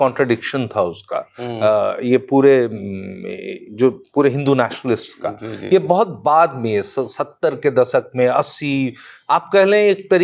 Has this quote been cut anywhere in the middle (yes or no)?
no